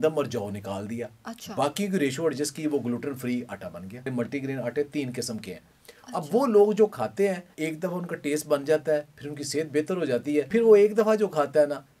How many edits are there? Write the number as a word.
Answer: three